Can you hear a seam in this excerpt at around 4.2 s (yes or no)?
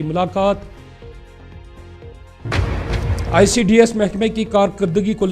no